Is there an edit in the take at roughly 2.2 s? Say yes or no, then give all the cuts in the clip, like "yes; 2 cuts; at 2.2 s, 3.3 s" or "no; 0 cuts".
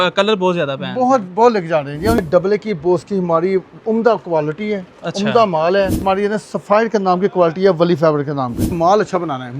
yes; 3 cuts; at 2.2 s, 6.0 s, 8.7 s